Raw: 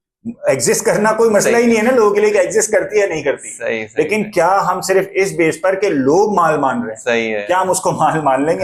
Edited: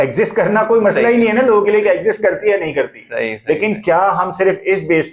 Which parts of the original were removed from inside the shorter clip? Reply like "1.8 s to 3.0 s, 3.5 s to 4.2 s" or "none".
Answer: none